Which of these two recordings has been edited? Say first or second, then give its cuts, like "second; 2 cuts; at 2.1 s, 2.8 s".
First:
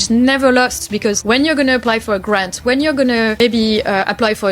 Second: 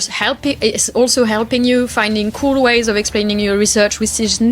first; 2 cuts; at 1.2 s, 3.4 s